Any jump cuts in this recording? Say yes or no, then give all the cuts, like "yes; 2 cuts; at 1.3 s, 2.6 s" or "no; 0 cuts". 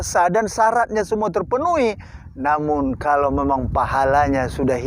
no; 0 cuts